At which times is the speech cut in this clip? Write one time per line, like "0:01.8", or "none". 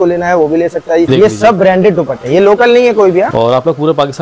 0:01.1
0:03.3